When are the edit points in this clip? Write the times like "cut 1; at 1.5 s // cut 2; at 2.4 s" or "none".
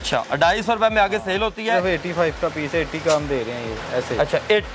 cut 1; at 1.8 s